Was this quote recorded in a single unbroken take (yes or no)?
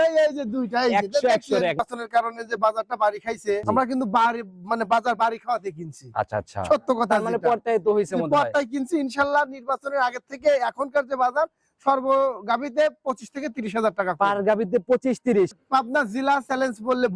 no